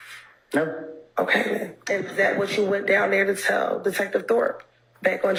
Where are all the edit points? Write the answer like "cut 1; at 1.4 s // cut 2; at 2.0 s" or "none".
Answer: none